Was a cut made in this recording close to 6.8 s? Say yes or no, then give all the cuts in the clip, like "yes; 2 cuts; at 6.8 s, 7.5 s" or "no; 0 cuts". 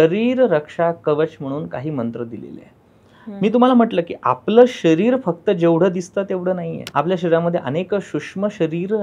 yes; 1 cut; at 6.8 s